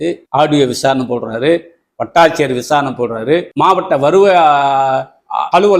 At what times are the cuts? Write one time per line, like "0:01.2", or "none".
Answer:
none